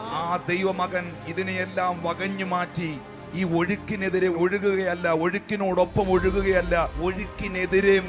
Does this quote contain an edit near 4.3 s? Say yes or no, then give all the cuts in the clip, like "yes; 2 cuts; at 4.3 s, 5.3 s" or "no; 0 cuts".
yes; 2 cuts; at 4.3 s, 6.9 s